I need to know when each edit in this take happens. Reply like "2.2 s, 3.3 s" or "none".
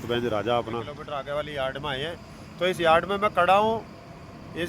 1.0 s